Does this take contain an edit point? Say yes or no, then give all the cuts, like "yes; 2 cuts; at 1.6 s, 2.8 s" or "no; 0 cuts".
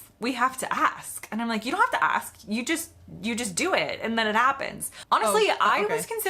yes; 1 cut; at 5.0 s